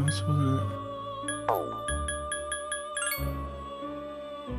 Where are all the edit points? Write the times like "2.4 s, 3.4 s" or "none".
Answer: none